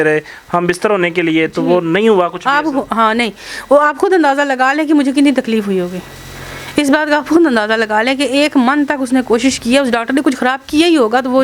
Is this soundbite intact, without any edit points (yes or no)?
yes